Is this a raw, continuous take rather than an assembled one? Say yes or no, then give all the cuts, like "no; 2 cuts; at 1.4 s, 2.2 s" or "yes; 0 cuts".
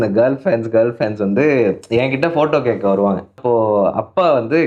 no; 1 cut; at 3.4 s